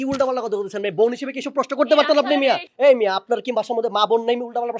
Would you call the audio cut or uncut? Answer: cut